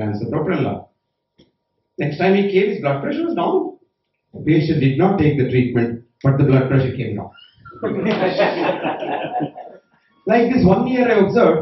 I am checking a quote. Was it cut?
yes; 1 cut; at 4.3 s

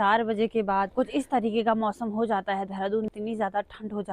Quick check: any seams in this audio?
yes; 2 cuts; at 0.9 s, 3.1 s

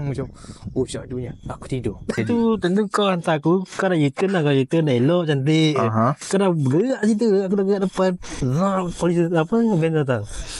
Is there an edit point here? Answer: yes; 1 cut; at 2.2 s

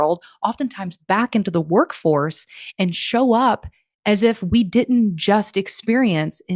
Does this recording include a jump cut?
no; 0 cuts

